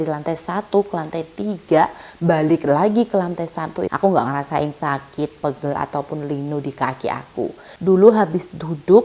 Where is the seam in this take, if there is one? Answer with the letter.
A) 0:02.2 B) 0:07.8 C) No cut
B